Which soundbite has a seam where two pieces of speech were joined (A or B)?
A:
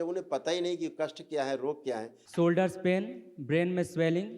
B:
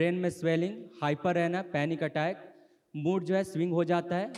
A